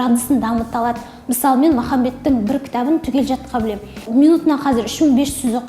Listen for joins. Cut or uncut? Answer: cut